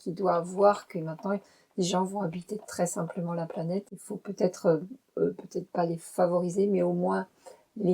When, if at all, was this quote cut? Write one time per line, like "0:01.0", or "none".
0:03.9